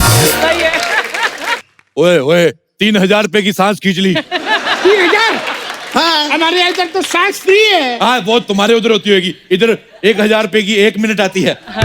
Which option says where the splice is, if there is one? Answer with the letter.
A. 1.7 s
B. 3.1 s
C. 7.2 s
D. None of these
A